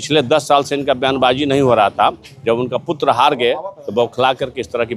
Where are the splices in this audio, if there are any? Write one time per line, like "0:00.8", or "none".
none